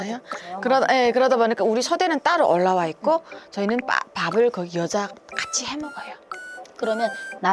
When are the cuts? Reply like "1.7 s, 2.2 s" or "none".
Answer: none

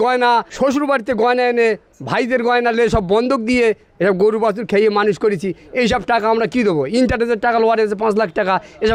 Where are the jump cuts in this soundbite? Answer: none

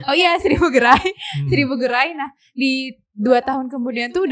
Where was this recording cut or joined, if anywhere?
none

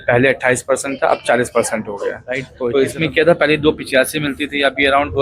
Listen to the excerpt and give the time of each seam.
2.5 s

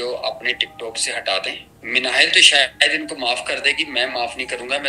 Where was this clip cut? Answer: 1.7 s

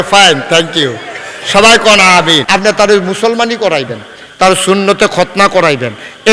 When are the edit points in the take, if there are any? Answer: 2.4 s

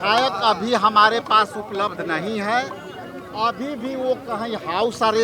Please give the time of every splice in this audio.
none

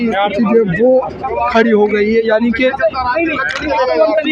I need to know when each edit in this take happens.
none

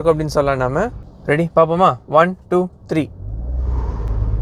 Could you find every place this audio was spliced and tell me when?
1.1 s

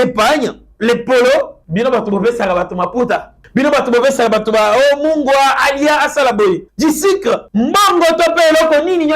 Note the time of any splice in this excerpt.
1.6 s, 3.4 s, 6.7 s, 7.5 s

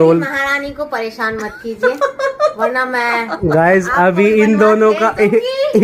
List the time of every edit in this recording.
none

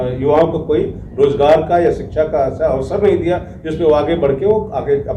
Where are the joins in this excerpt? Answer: none

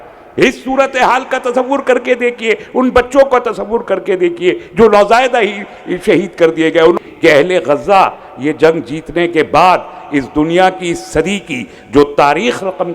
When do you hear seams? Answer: 6.9 s

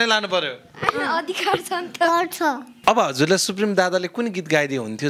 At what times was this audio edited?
2.7 s

